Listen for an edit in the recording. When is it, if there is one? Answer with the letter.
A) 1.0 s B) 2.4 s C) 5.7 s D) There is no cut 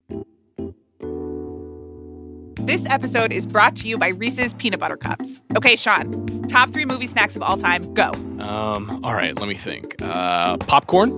B